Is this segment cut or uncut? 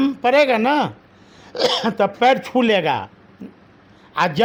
uncut